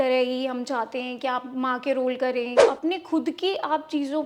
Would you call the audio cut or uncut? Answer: cut